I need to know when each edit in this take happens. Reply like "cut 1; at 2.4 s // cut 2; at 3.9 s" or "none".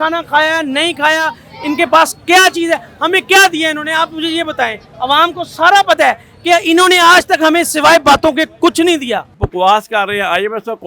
cut 1; at 9.4 s